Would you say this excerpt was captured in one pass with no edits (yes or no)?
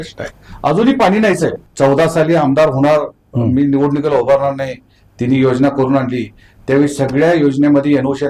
no